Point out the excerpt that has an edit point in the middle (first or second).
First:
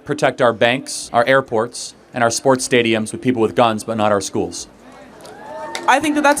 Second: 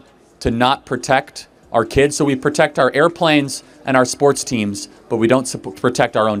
first